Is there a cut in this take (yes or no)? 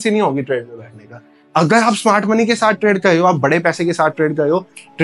no